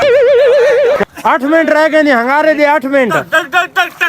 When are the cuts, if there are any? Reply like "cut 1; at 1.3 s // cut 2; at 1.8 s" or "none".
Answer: cut 1; at 0.9 s